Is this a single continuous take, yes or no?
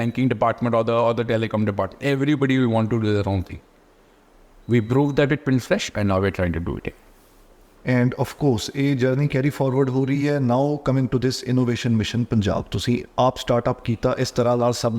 yes